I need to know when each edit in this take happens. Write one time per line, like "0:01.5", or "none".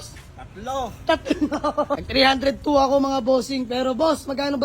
0:02.0